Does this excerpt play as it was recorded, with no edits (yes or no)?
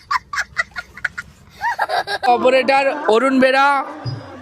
no